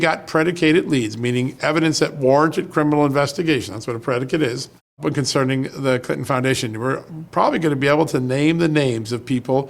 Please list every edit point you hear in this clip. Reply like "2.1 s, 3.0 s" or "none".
5.0 s